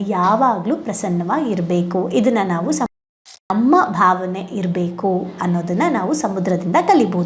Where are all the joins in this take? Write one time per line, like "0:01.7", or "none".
0:03.1

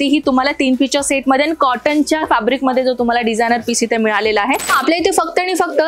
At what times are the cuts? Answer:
0:04.7

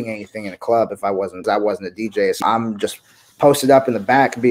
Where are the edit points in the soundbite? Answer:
0:01.4
0:02.4

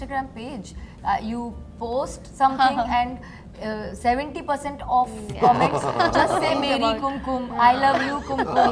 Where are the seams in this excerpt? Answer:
none

